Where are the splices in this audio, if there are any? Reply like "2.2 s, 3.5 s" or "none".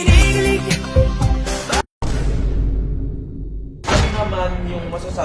1.8 s, 3.8 s